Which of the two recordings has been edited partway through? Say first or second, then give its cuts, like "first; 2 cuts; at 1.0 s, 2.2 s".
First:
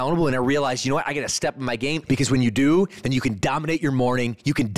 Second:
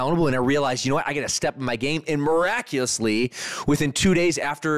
first; 1 cut; at 2.0 s